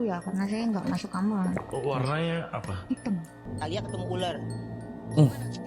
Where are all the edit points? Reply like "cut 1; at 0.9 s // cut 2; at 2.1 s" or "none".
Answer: cut 1; at 3.4 s